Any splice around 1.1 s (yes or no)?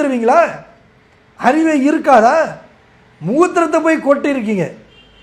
no